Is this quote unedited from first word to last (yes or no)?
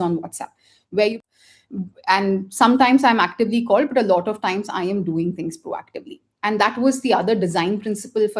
no